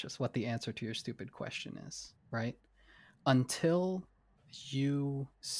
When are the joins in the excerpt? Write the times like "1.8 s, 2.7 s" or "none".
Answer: none